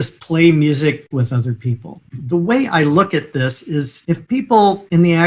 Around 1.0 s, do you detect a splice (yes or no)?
yes